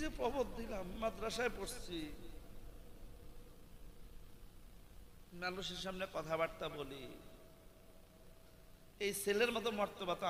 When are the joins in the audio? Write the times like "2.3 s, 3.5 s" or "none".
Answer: none